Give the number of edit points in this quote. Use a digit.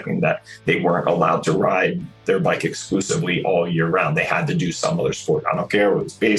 0